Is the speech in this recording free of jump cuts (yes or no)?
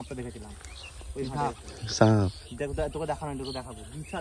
yes